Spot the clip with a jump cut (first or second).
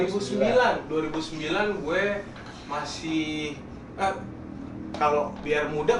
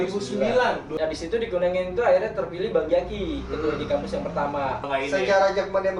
second